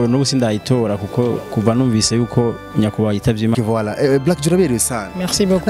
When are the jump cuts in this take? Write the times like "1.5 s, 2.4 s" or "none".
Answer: 3.5 s